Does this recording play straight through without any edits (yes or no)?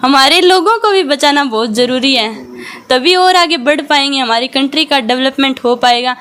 yes